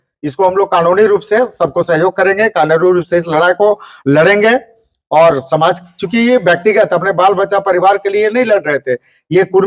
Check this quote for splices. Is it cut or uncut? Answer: uncut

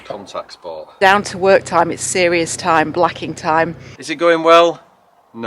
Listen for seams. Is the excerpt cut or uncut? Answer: cut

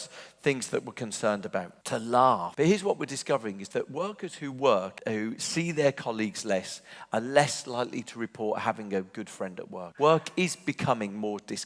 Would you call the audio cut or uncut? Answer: cut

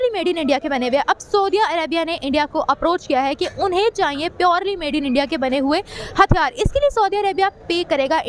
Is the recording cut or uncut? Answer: uncut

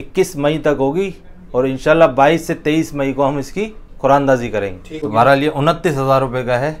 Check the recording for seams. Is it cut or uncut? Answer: cut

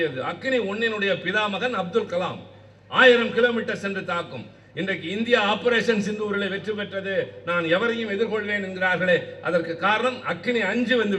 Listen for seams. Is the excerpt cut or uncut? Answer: uncut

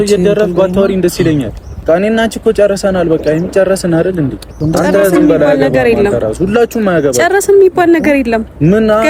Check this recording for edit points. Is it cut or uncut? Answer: cut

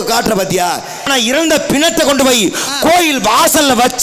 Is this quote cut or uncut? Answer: cut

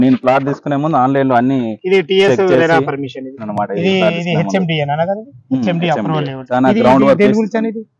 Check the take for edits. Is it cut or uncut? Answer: cut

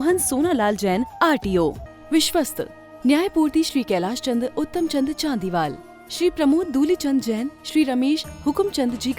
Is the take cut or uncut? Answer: cut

